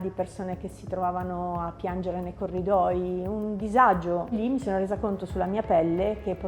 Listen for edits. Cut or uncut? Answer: cut